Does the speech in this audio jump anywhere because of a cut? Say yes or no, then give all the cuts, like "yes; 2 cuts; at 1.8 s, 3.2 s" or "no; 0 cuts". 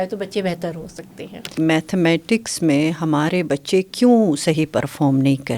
yes; 1 cut; at 1.6 s